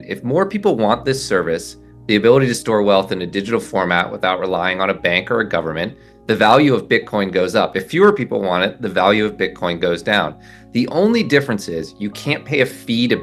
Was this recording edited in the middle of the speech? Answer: no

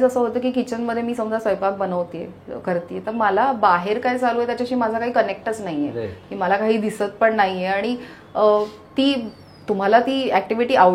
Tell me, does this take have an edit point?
no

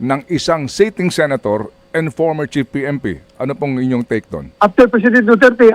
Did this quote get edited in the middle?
yes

